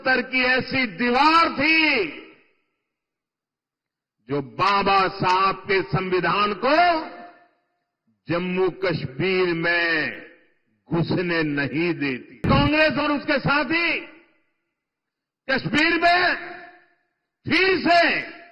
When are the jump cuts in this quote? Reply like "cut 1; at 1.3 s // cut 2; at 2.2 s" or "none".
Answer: cut 1; at 12.4 s